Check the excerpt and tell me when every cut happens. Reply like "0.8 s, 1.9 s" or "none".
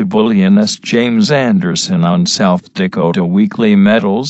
none